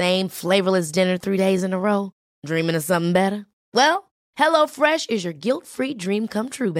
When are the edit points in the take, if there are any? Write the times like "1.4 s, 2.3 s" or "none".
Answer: none